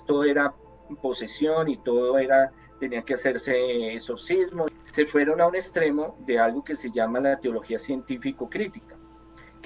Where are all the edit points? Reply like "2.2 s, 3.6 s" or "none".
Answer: 4.7 s